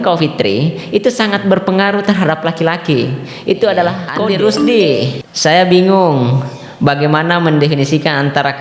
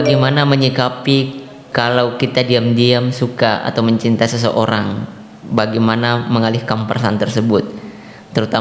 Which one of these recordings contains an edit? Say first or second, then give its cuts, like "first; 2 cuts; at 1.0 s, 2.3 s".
first; 1 cut; at 4.1 s